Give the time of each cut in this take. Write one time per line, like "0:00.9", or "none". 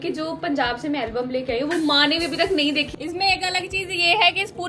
0:02.9